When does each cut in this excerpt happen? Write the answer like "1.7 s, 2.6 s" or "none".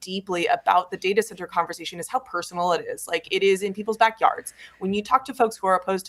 none